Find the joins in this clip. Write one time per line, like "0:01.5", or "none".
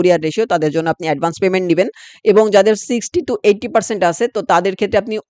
none

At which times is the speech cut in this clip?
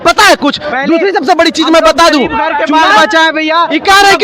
none

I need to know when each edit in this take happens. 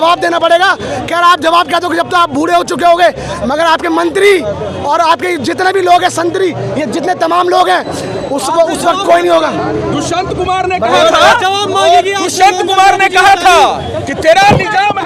none

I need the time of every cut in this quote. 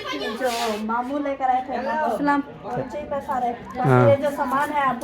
0:02.7

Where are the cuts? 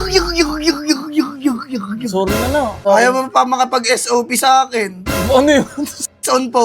0:02.8

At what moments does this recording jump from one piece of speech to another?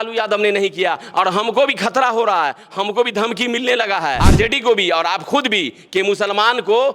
0:04.2

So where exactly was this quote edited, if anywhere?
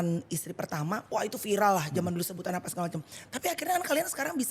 0:01.0

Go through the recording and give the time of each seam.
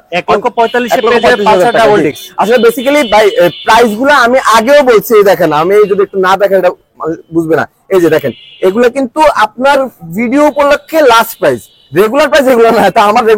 none

